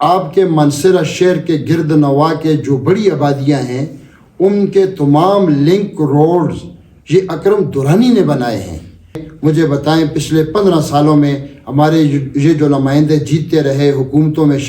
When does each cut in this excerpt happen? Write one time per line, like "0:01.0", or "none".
0:09.3